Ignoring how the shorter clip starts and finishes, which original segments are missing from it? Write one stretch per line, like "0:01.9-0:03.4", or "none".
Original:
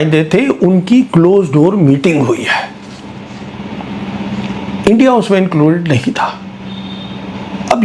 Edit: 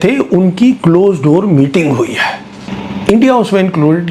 0:03.0-0:04.5